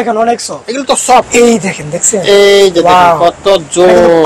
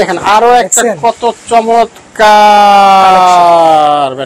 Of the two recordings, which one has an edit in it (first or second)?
first